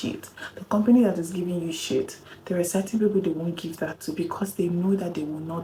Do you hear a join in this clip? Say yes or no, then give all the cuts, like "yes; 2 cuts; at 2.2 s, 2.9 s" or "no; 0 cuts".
no; 0 cuts